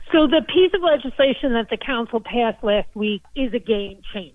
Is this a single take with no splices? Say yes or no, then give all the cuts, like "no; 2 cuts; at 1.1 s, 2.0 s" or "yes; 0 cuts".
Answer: no; 1 cut; at 3.3 s